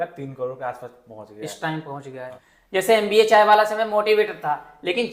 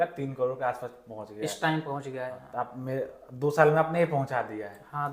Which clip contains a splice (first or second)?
first